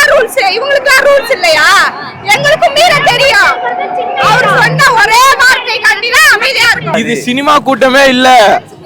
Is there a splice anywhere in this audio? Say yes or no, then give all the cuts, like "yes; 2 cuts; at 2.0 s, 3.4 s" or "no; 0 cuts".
yes; 1 cut; at 6.9 s